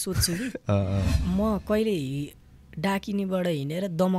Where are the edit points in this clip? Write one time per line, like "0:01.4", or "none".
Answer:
0:01.1